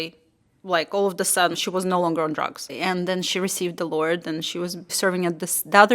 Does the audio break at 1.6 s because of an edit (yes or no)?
yes